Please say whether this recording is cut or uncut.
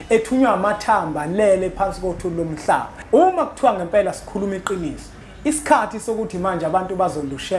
cut